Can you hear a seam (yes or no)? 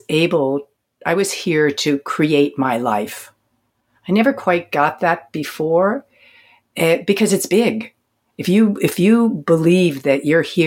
no